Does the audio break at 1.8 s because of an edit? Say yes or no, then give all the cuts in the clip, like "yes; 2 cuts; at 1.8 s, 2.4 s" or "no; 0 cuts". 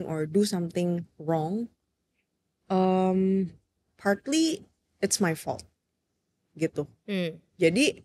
no; 0 cuts